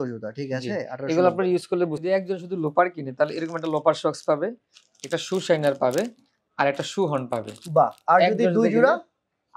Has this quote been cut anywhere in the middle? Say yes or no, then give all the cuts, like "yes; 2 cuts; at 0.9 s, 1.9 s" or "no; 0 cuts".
yes; 1 cut; at 2.0 s